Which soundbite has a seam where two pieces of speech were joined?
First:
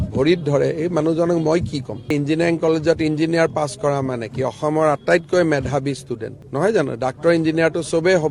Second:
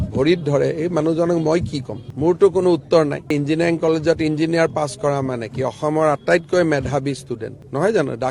first; 1 cut; at 2.0 s

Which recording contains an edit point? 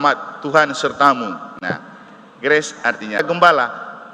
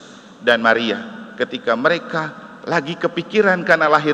first; 1 cut; at 3.2 s

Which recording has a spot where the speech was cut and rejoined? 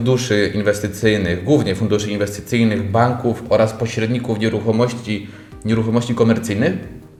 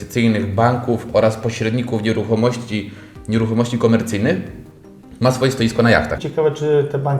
second; 1 cut; at 6.2 s

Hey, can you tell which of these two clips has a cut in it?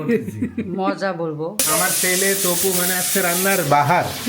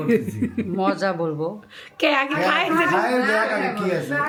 first; 1 cut; at 1.6 s

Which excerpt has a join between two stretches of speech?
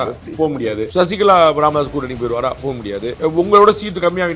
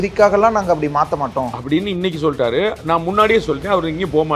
first; 2 cuts; at 0.9 s, 3.2 s

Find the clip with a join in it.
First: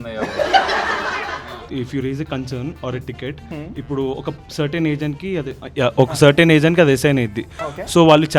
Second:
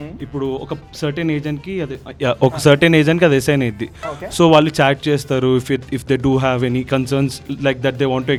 first; 1 cut; at 1.3 s

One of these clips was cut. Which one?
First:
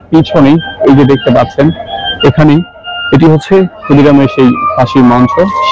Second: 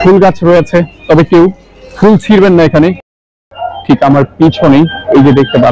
second; 1 cut; at 3.1 s

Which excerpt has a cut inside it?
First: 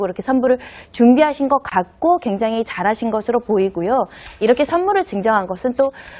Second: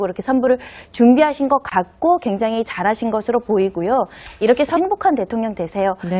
first; 1 cut; at 4.8 s

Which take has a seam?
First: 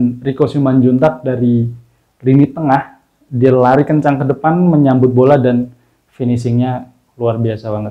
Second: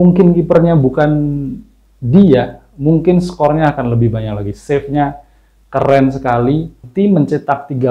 second; 1 cut; at 6.9 s

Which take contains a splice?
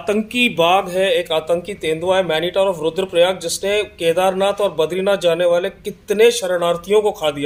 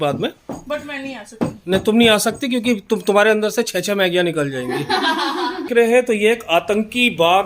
second; 1 cut; at 5.7 s

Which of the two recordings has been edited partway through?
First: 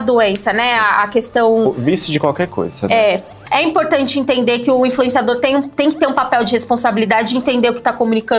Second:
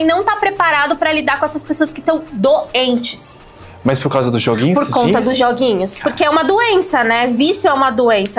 first; 1 cut; at 3.4 s

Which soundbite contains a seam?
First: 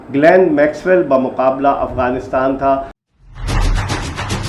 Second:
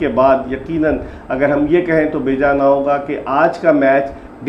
first; 1 cut; at 2.9 s

